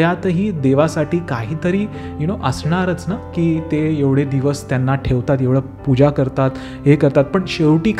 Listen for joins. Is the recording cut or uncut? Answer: uncut